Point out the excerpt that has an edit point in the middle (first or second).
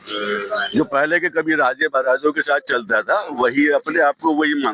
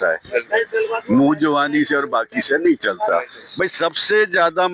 second